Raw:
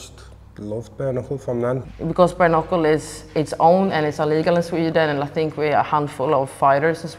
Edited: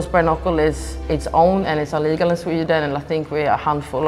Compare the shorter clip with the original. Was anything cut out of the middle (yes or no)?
no